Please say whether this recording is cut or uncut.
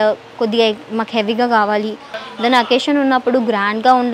cut